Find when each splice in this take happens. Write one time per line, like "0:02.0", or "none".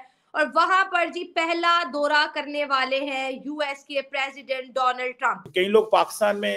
0:05.4